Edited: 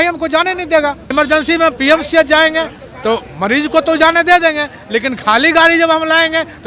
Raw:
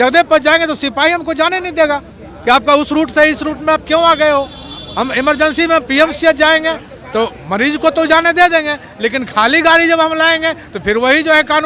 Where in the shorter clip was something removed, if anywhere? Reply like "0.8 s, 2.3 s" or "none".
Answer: 1.1 s